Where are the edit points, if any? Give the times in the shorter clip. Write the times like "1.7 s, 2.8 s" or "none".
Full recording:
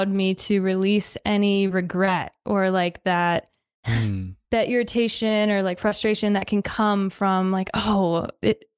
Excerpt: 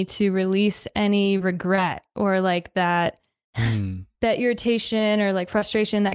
none